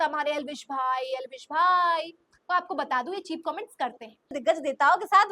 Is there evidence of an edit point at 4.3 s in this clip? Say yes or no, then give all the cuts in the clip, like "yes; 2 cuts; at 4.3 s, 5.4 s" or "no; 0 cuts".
yes; 1 cut; at 4.3 s